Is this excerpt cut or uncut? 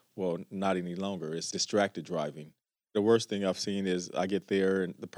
cut